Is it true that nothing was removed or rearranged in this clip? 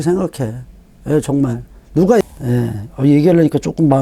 no; 1 cut; at 2.2 s

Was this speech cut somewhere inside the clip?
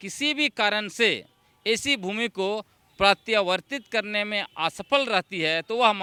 no; 0 cuts

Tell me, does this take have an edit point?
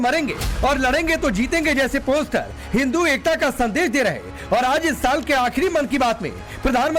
no; 0 cuts

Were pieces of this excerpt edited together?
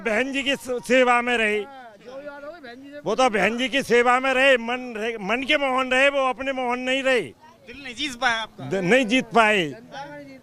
no; 0 cuts

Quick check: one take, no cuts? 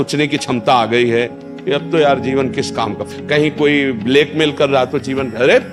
yes; 0 cuts

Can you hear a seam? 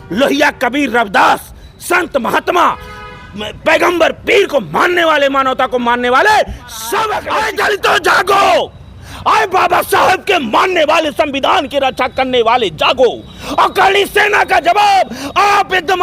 yes; 1 cut; at 7.2 s

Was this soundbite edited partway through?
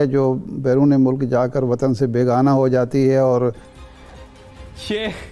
yes; 1 cut; at 3.9 s

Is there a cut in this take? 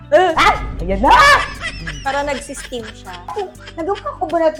no; 0 cuts

